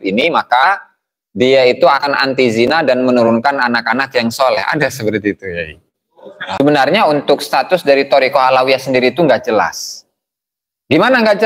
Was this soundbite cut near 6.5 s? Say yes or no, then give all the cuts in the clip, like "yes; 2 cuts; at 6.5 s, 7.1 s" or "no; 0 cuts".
yes; 1 cut; at 6.5 s